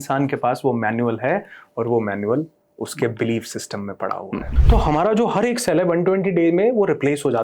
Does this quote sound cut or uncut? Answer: cut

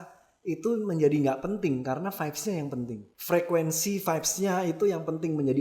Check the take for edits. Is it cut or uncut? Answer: cut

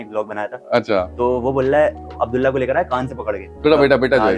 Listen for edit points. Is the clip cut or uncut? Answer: uncut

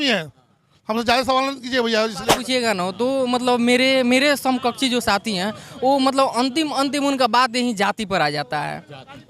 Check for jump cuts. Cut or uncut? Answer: cut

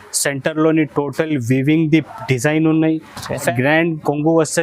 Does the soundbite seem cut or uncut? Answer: cut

